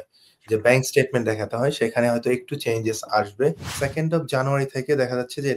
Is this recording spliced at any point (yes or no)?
yes